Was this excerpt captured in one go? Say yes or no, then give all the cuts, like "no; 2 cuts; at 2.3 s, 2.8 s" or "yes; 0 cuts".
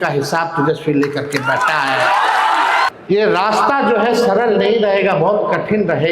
no; 1 cut; at 2.9 s